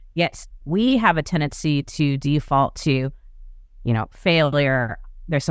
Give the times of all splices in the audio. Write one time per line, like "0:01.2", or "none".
none